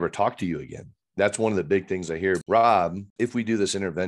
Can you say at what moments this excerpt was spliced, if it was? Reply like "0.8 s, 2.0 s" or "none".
2.4 s, 3.0 s

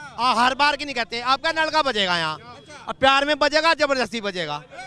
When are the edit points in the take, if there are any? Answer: none

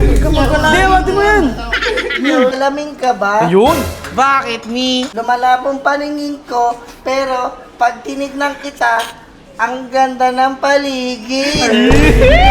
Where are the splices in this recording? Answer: 2.5 s, 5.1 s

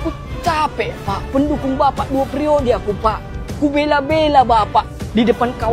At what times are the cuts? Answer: none

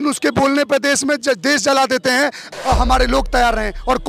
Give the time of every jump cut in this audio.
2.5 s

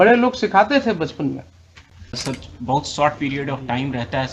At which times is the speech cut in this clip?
2.2 s

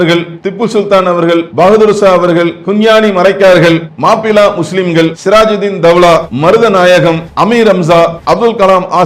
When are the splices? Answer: 1.5 s, 2.6 s, 3.9 s, 5.2 s, 6.3 s, 7.3 s, 8.2 s

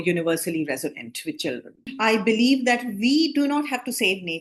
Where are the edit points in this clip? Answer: 1.9 s

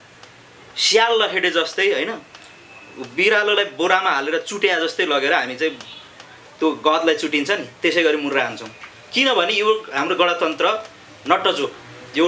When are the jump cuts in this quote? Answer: none

